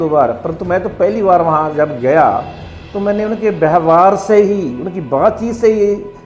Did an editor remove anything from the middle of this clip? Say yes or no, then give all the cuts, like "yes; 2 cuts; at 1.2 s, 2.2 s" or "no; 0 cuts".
no; 0 cuts